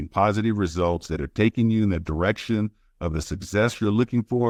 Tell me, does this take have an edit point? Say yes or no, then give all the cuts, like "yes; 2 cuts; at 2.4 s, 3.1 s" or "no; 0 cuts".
no; 0 cuts